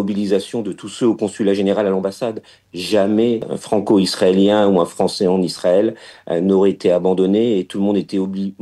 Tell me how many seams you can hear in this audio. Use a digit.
1